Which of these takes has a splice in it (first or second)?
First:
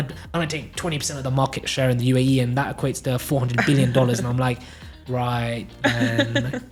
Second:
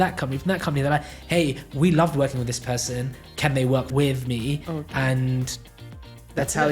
second